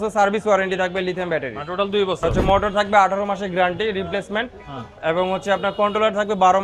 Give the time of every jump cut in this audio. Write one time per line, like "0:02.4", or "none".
0:02.4

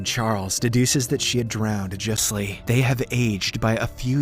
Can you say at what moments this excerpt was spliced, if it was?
0:02.2

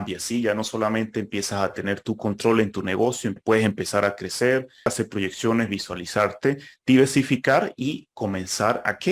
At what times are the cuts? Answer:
0:03.4
0:04.9

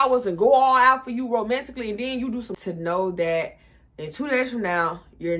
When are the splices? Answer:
0:02.5

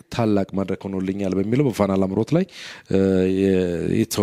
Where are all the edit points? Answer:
none

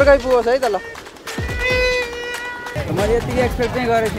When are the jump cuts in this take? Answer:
0:02.7

